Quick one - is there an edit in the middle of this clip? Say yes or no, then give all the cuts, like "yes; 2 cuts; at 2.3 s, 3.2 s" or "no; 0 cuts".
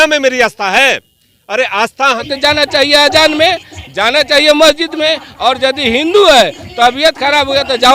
yes; 1 cut; at 2.2 s